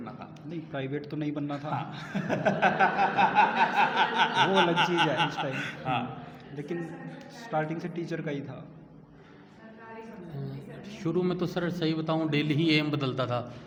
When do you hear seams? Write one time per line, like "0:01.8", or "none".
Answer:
none